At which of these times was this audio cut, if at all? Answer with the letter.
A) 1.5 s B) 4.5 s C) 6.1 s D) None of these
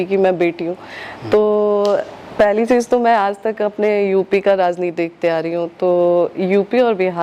D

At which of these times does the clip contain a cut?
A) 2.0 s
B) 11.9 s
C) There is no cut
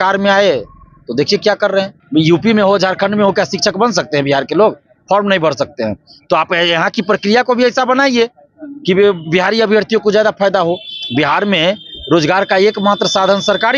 A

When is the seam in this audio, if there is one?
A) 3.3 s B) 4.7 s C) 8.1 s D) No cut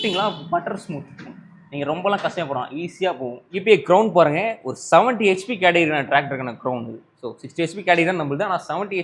A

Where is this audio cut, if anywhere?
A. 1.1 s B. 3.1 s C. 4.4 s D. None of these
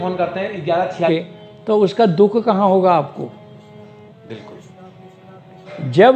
A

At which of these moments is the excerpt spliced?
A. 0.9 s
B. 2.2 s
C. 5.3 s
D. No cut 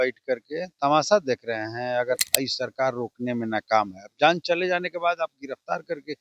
B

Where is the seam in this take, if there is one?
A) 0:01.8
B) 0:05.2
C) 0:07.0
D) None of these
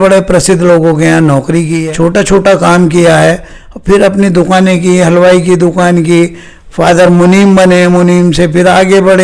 A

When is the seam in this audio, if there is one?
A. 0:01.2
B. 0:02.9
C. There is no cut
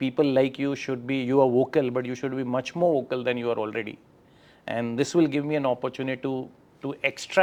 C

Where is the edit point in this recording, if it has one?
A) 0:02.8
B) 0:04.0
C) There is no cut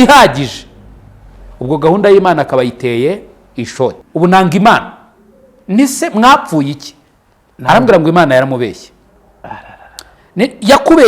B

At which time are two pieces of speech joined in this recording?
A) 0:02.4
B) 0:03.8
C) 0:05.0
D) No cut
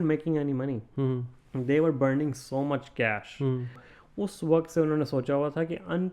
B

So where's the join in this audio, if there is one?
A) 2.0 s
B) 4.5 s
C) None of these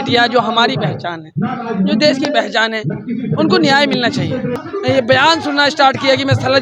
B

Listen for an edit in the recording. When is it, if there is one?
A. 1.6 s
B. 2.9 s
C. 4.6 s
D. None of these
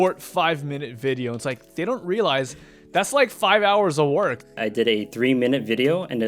C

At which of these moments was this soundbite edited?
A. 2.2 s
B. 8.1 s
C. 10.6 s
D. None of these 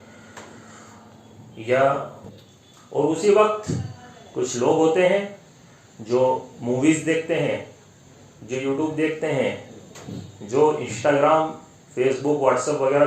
A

